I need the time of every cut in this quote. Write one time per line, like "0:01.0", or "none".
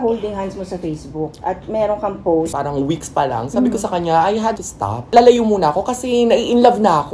0:02.5